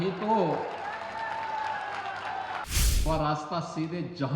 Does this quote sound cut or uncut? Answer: cut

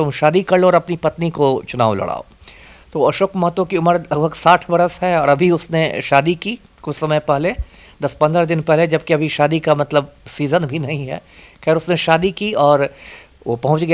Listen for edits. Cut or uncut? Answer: uncut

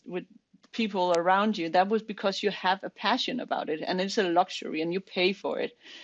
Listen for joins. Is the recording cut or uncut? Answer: uncut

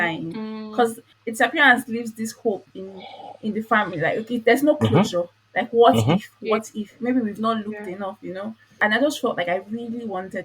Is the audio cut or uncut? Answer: cut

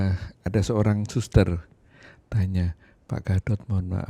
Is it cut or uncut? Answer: uncut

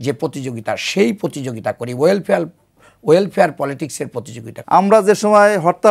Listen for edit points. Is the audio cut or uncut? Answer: cut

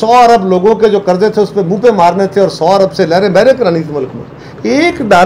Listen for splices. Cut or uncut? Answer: uncut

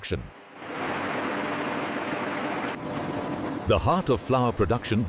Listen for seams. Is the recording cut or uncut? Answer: uncut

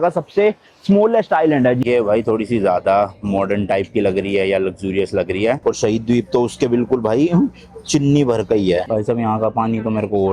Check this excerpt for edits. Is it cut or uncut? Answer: cut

